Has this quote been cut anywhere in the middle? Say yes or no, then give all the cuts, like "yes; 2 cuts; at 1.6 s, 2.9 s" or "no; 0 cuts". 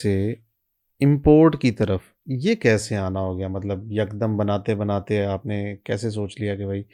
no; 0 cuts